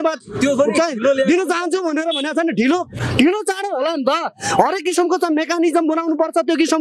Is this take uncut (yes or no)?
yes